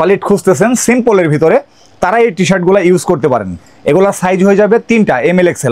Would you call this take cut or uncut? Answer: uncut